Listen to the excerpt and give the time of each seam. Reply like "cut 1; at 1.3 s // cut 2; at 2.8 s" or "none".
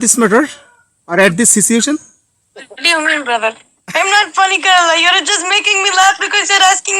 cut 1; at 2.7 s